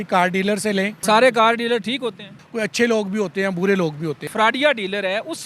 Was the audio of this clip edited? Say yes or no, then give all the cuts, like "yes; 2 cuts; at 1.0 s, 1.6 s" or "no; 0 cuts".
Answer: yes; 3 cuts; at 1.0 s, 2.4 s, 4.2 s